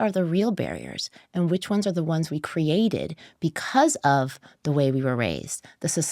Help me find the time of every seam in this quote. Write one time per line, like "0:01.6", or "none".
none